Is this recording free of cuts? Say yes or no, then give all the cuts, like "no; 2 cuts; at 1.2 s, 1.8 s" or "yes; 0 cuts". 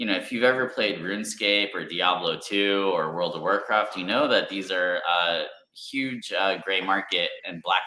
yes; 0 cuts